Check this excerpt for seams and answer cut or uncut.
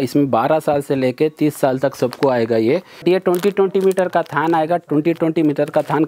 cut